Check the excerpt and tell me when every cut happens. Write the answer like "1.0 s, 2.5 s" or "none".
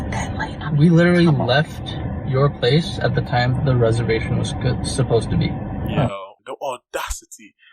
6.3 s